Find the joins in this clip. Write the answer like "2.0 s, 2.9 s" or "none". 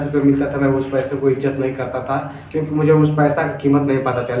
none